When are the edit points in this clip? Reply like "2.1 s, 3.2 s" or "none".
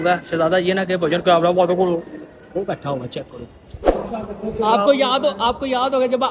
3.9 s